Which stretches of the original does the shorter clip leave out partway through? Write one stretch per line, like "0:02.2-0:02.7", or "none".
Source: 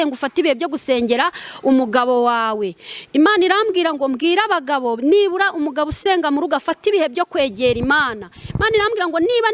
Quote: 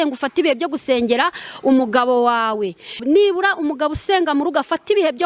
0:03.0-0:04.9